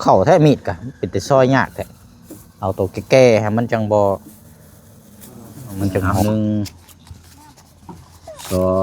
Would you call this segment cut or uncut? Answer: cut